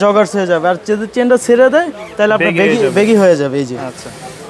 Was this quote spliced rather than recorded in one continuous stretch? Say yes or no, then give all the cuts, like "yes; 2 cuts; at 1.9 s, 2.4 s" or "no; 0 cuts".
no; 0 cuts